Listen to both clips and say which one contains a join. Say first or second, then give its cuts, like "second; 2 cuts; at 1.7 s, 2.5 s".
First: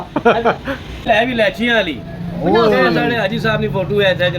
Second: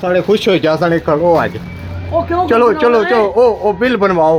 first; 1 cut; at 1.0 s